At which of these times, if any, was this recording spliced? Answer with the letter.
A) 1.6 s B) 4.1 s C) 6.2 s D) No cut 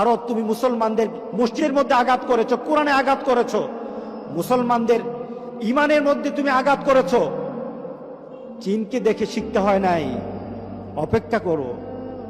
A